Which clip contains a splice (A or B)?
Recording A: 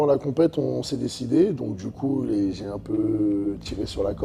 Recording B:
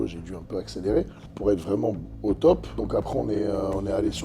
B